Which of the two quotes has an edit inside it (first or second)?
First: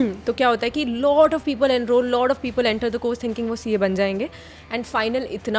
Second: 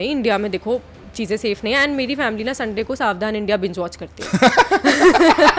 second